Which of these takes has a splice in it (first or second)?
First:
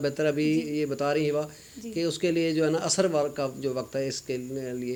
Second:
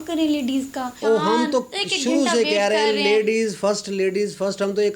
second